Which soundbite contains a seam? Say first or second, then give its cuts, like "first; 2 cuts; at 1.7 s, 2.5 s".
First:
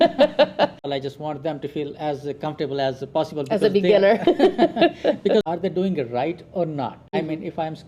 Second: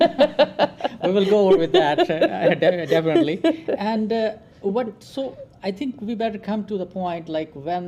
first; 3 cuts; at 0.8 s, 5.5 s, 7.1 s